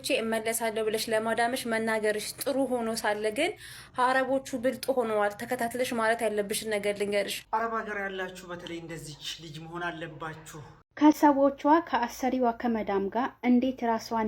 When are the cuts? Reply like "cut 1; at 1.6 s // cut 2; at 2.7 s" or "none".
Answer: cut 1; at 7.4 s // cut 2; at 10.8 s